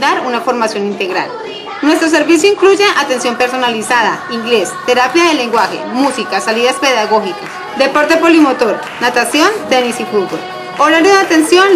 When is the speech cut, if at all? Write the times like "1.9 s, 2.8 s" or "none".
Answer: none